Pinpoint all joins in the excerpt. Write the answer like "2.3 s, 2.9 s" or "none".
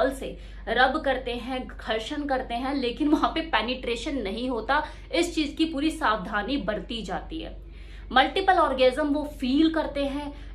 none